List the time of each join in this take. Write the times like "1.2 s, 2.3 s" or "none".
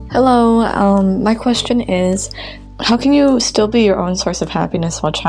none